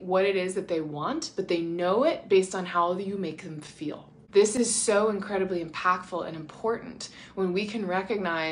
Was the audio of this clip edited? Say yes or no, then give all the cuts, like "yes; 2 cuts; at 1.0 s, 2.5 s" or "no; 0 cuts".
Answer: yes; 1 cut; at 4.1 s